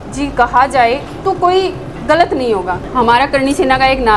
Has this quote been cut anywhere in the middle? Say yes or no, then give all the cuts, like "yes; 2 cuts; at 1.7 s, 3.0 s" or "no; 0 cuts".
yes; 1 cut; at 2.8 s